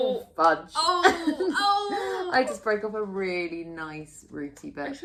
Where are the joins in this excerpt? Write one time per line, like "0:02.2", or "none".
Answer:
none